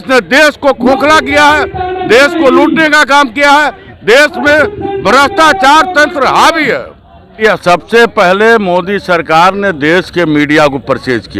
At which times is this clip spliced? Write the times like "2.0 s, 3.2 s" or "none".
7.4 s